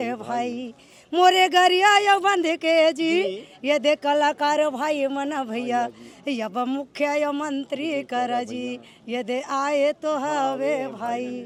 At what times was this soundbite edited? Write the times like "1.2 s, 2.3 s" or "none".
none